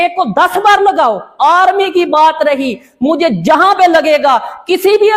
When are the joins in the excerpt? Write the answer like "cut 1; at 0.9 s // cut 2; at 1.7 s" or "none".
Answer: none